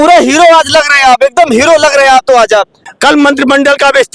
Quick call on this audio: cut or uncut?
cut